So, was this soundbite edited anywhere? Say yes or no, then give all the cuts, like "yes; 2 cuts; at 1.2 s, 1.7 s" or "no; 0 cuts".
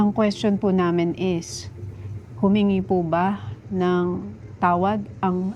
no; 0 cuts